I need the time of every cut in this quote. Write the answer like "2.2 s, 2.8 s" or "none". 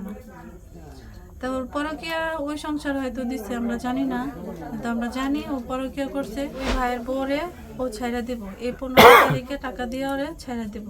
6.6 s